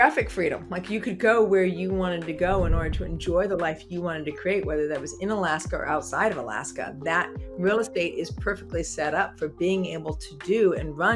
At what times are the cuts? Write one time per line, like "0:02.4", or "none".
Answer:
none